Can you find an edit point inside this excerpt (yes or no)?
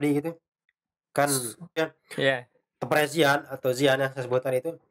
yes